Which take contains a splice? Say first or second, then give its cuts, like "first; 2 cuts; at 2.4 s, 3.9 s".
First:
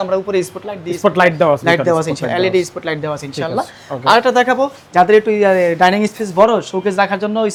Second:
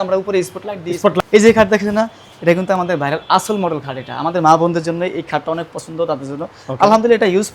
second; 1 cut; at 1.2 s